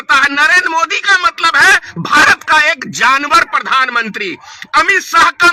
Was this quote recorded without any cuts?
yes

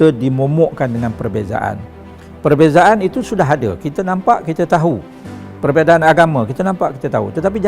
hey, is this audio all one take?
yes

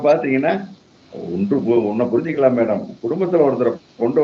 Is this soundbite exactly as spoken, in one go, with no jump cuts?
yes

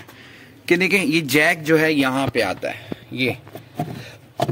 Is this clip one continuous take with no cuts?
yes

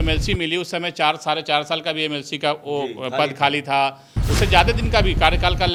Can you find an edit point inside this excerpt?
no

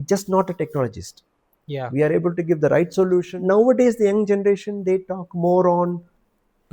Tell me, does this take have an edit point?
yes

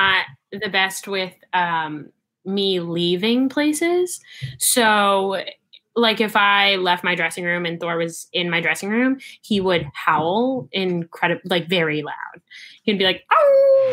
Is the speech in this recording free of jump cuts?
yes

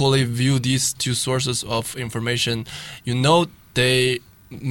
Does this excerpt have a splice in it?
no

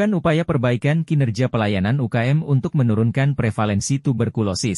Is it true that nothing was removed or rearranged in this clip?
yes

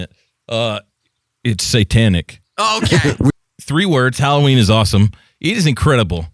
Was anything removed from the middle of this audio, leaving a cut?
yes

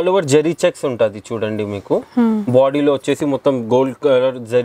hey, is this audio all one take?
yes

